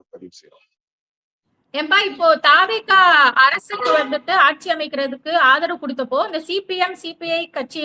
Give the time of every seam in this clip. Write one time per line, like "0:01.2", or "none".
none